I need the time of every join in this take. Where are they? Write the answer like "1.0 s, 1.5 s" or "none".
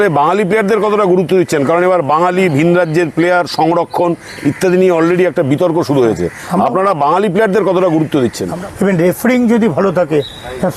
8.5 s

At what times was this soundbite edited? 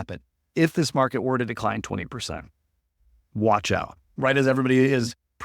4.1 s

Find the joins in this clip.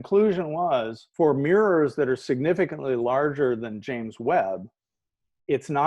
1.0 s

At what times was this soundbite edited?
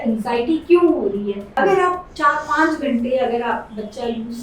1.4 s

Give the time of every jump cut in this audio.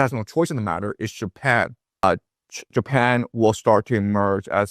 2.0 s

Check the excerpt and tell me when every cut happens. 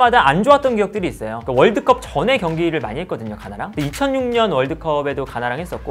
none

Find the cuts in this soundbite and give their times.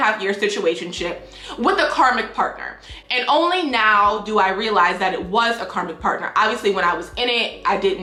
none

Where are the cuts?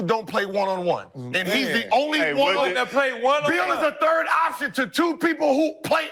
none

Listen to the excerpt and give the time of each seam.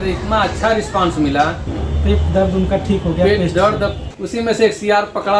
1.7 s, 4.1 s

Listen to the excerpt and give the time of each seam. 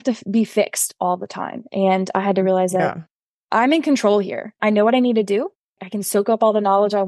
4.6 s, 5.8 s

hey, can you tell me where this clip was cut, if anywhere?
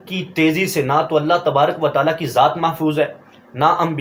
none

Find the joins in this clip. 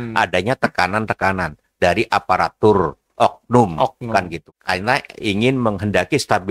4.4 s

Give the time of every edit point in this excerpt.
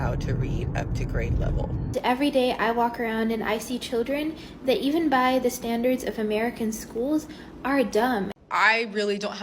1.9 s, 8.3 s

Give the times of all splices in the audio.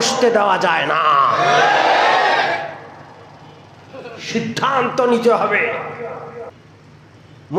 6.5 s

